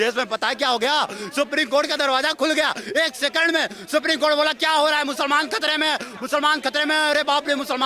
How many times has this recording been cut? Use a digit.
0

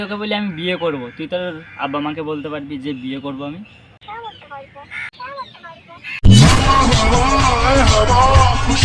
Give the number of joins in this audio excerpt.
0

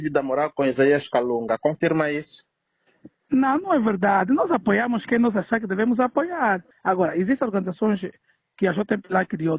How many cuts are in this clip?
1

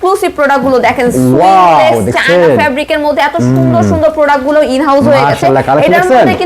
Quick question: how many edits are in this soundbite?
0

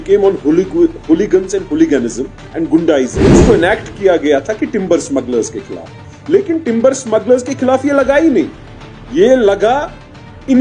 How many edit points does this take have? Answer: 1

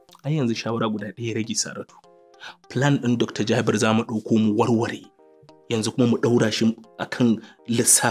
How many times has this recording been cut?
0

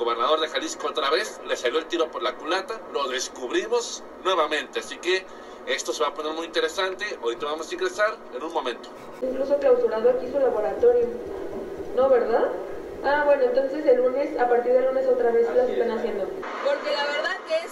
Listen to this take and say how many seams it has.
2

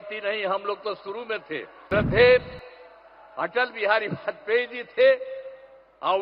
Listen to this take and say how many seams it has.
1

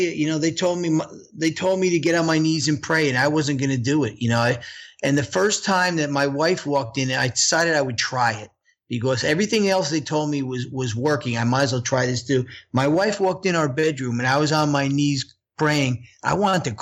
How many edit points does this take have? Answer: 0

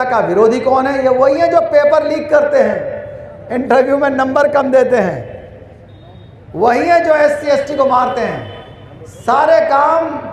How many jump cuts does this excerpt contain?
0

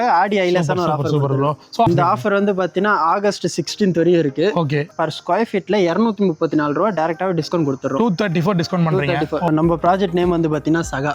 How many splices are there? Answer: 3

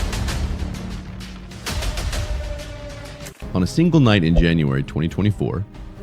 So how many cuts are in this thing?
1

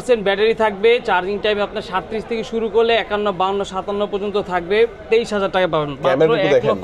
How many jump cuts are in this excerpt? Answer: 0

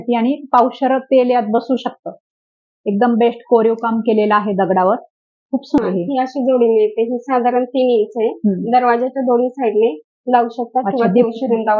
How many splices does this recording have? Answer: 1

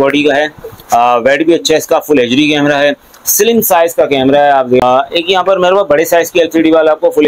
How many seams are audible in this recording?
1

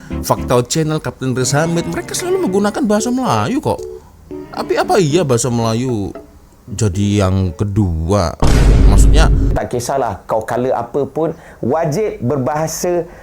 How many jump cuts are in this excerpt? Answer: 1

